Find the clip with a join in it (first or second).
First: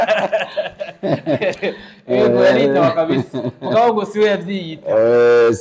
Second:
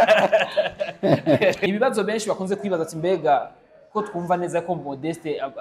second